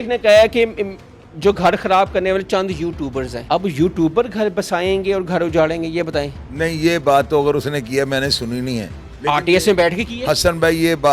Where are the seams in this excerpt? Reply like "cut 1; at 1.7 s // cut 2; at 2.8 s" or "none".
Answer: cut 1; at 3.4 s